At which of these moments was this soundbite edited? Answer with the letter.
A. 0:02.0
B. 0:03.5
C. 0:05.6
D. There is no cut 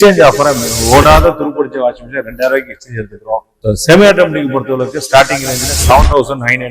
B